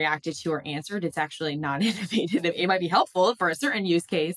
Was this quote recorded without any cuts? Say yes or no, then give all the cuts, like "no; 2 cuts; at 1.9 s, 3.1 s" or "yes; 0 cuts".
no; 1 cut; at 2.6 s